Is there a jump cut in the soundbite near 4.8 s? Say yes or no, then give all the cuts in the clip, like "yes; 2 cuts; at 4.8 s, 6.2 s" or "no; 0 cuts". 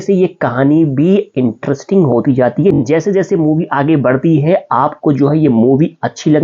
no; 1 cut; at 2.8 s